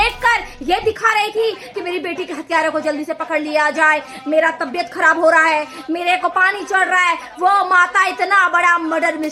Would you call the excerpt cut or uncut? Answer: uncut